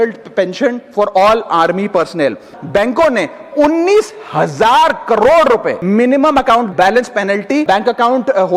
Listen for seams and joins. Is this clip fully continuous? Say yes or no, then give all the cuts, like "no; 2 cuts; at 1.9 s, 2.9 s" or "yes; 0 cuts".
no; 2 cuts; at 2.5 s, 5.7 s